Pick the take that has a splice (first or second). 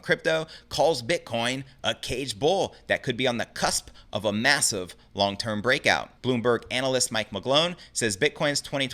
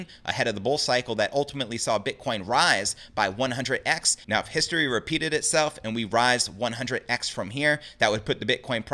first